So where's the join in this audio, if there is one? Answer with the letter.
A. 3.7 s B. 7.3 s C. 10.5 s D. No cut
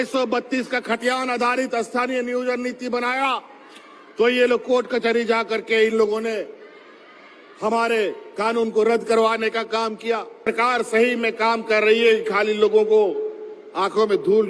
C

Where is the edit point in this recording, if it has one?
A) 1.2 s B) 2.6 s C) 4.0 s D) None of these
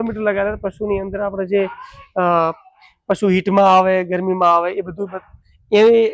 D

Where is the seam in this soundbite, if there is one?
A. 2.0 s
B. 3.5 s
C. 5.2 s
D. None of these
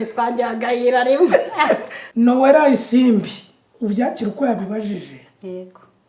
A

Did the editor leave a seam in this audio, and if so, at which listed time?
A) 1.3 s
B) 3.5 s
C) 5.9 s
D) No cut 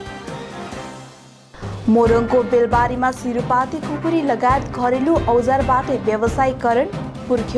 D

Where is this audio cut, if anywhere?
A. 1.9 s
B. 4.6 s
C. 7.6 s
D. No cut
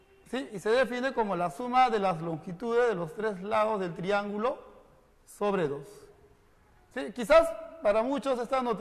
D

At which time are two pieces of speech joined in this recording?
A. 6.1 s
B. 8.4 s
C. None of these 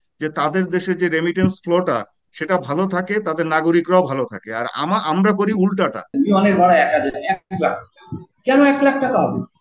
A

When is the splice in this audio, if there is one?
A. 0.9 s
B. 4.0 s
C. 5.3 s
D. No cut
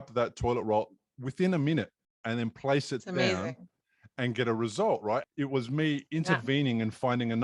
C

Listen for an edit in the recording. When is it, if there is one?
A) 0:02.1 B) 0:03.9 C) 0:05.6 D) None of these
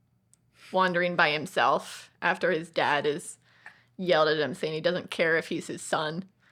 D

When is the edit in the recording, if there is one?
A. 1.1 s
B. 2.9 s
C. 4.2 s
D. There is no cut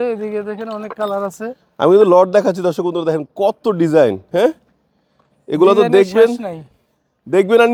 D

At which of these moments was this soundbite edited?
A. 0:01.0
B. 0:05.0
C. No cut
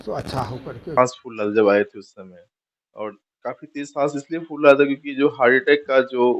A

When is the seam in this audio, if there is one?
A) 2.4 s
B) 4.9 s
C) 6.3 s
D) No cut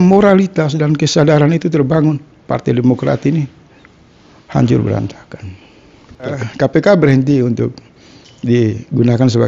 C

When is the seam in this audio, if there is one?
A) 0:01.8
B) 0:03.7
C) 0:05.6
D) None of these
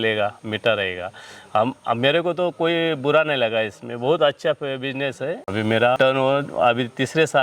C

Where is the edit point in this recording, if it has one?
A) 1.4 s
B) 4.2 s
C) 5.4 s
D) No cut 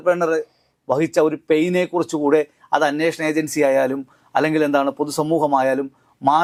D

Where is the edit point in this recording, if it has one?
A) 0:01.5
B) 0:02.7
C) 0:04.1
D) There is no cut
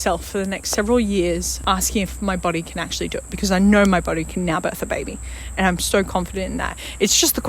A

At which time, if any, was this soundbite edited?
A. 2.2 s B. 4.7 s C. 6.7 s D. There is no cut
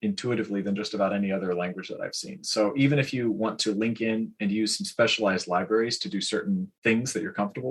C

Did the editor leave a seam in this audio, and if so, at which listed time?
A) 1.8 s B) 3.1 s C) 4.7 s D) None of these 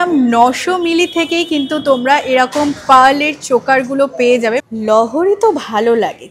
C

